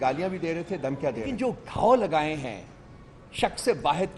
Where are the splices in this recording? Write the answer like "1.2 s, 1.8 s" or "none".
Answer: 1.3 s